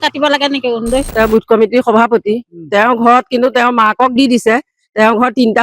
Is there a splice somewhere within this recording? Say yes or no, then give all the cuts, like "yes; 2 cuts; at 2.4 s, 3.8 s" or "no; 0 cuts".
yes; 1 cut; at 1.1 s